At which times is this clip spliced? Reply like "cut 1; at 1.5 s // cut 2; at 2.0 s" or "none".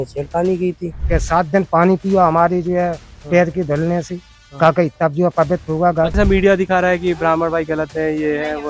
cut 1; at 0.9 s // cut 2; at 6.1 s